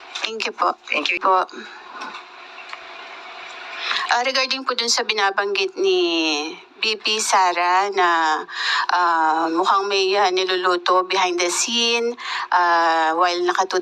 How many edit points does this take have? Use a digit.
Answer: 1